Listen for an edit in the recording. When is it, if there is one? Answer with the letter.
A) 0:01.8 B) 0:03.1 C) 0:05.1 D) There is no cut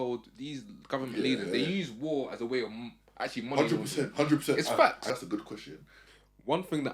C